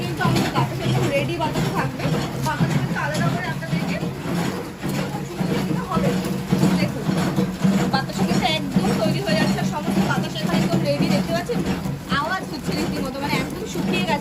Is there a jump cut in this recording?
no; 0 cuts

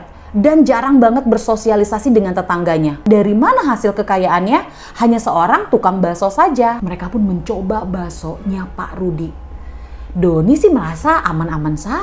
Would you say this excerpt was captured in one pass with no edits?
no; 2 cuts; at 3.0 s, 6.8 s

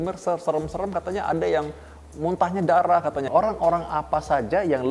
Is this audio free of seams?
no; 1 cut; at 3.3 s

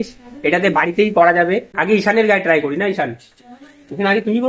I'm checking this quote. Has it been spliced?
yes; 1 cut; at 1.7 s

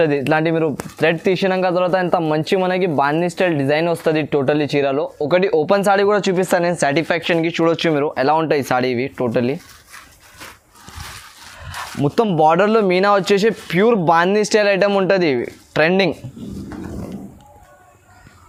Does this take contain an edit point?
no; 0 cuts

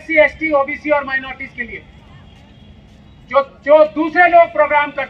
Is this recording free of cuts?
yes; 0 cuts

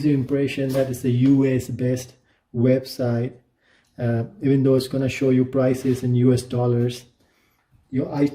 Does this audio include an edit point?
no; 0 cuts

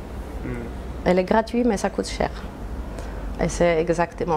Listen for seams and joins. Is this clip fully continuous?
yes; 0 cuts

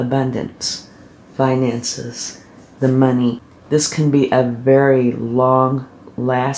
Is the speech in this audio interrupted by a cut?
yes; 1 cut; at 3.5 s

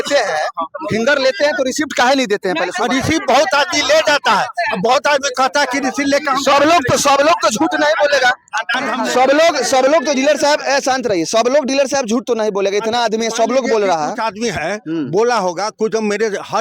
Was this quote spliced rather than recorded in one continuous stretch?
no; 0 cuts

